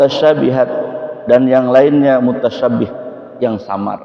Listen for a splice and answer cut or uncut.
uncut